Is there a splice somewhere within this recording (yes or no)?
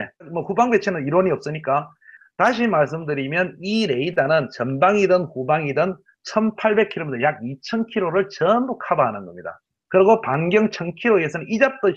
yes